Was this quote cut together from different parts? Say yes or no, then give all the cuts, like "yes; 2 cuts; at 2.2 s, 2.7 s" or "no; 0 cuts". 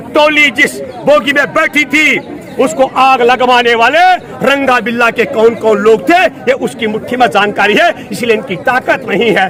no; 0 cuts